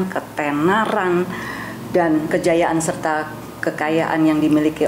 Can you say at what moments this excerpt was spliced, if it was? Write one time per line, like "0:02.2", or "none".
0:02.3